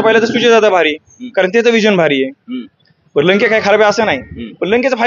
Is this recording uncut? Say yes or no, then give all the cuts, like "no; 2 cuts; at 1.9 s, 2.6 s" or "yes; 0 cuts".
yes; 0 cuts